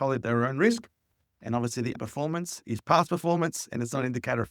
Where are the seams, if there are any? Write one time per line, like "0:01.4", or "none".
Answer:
0:02.0